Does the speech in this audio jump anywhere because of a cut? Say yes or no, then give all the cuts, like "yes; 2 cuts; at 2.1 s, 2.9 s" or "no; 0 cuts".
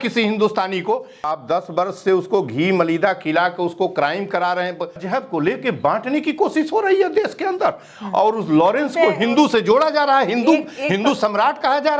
yes; 2 cuts; at 1.3 s, 5.0 s